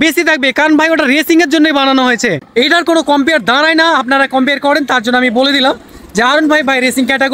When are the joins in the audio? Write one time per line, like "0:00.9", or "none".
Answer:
0:02.4